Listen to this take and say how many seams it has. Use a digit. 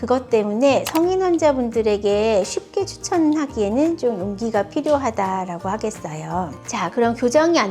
1